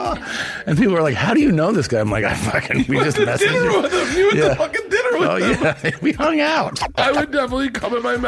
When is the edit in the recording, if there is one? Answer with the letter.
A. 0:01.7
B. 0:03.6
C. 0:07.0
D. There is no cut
C